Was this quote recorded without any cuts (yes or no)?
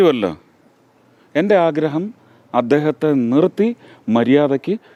yes